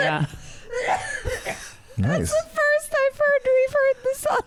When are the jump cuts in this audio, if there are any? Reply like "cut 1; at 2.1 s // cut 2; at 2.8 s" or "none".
none